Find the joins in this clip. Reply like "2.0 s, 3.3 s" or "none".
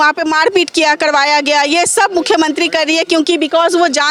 none